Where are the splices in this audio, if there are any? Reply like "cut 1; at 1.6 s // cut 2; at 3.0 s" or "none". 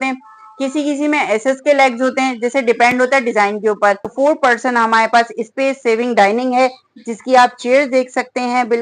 cut 1; at 4.1 s